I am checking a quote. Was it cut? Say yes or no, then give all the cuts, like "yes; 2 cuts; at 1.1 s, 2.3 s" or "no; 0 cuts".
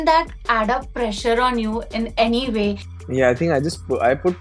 yes; 1 cut; at 2.9 s